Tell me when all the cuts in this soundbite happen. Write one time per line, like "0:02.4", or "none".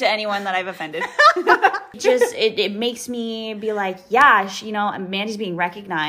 0:02.0